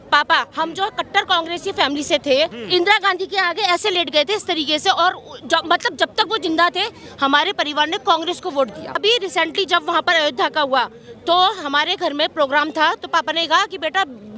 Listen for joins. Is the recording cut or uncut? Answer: cut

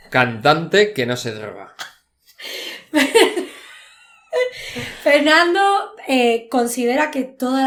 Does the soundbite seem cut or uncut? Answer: uncut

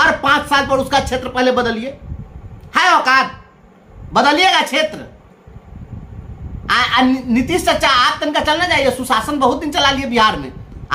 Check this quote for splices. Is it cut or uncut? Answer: uncut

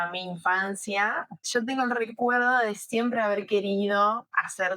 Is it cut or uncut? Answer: cut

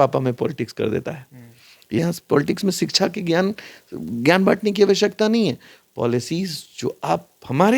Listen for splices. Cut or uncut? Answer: cut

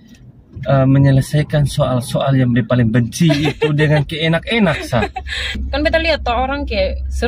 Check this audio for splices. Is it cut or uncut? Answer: cut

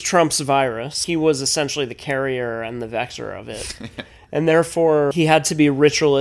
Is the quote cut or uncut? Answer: cut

